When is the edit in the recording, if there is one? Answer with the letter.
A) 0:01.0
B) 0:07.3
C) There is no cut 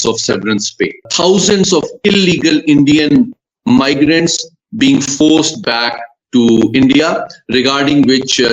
A